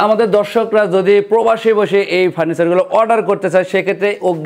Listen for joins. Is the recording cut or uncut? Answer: uncut